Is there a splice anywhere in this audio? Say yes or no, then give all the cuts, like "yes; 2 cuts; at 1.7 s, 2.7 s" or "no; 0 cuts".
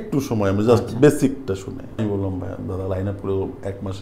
yes; 1 cut; at 2.0 s